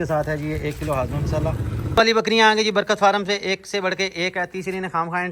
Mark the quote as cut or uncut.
cut